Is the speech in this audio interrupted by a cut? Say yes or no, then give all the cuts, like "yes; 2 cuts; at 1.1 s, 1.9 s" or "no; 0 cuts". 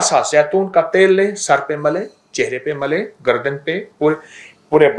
no; 0 cuts